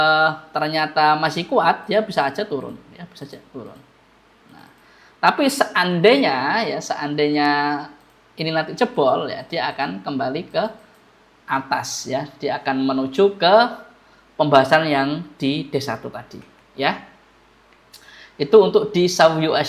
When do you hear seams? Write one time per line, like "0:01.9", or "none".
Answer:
none